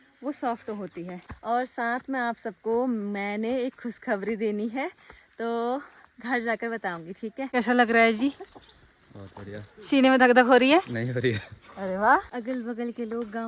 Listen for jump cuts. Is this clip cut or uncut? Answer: cut